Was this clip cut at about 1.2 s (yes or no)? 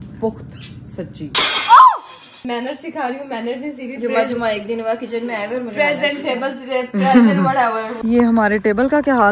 yes